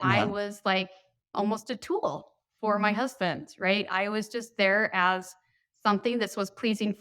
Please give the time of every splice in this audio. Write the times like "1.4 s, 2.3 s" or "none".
none